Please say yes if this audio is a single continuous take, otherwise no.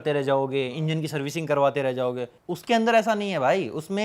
no